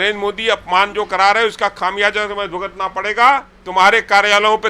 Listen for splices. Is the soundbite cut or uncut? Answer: cut